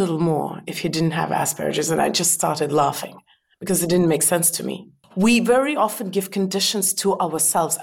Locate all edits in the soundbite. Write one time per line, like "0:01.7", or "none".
0:05.0